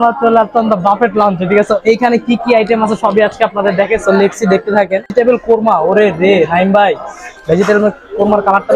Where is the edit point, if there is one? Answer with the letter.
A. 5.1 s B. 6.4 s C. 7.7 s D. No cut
A